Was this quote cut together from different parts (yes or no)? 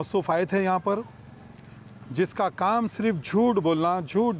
no